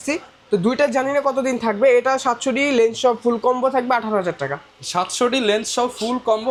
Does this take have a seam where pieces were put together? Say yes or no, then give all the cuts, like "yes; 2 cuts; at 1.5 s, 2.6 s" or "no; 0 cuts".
no; 0 cuts